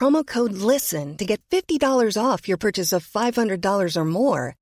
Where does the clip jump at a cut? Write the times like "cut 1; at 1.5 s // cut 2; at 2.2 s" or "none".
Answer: none